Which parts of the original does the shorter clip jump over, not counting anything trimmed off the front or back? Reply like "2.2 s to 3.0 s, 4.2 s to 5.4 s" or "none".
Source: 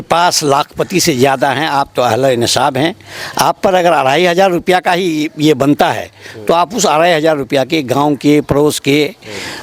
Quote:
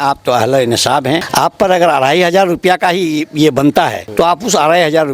3.0 s to 3.3 s, 6.0 s to 6.3 s